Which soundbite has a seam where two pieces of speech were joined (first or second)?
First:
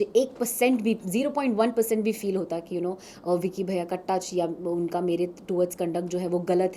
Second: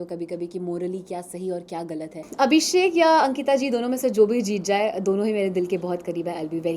second